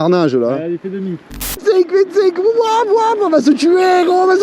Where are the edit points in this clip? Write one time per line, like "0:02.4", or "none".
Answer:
0:01.6